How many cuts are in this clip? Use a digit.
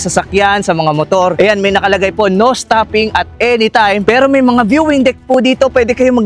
2